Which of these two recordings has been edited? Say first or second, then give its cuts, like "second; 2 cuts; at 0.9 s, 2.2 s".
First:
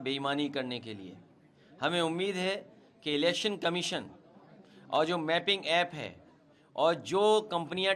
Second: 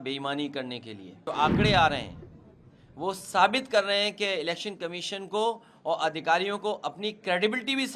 second; 1 cut; at 1.3 s